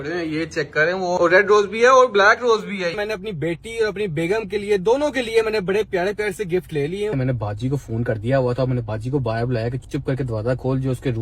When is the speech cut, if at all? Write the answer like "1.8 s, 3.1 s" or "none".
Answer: 1.2 s, 2.9 s, 7.1 s